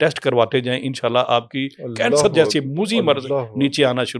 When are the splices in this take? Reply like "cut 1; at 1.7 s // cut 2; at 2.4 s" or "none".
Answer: none